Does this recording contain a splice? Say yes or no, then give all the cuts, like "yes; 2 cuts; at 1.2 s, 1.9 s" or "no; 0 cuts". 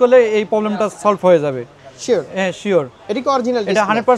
no; 0 cuts